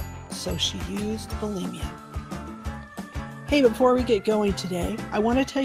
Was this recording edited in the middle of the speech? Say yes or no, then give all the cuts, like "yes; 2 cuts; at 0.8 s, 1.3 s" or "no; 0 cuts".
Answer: no; 0 cuts